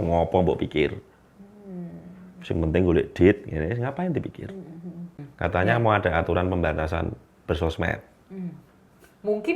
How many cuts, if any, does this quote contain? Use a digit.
1